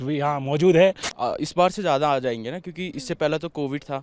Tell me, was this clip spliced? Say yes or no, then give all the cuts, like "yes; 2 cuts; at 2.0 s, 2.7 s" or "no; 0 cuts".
yes; 1 cut; at 1.1 s